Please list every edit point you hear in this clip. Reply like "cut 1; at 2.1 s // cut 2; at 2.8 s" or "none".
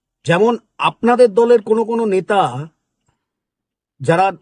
none